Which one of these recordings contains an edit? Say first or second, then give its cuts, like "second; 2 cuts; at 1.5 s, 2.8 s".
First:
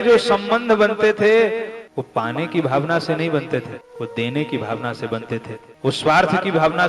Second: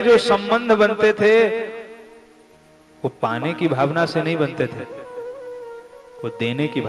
first; 3 cuts; at 1.8 s, 3.8 s, 5.6 s